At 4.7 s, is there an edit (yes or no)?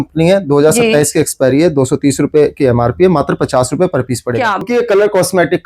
yes